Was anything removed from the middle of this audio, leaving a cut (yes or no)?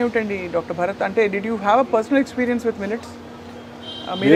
no